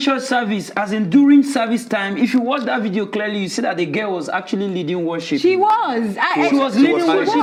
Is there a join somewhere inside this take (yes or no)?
no